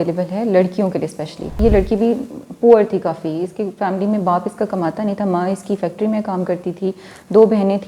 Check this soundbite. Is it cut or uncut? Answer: cut